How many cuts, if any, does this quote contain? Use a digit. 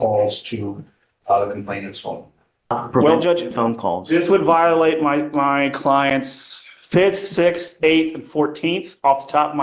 1